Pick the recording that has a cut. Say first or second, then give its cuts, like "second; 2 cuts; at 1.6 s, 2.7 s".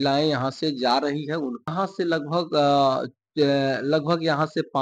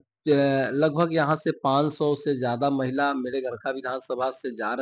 first; 1 cut; at 1.7 s